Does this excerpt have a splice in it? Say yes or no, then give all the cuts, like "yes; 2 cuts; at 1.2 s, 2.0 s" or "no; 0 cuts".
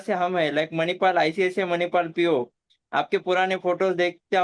no; 0 cuts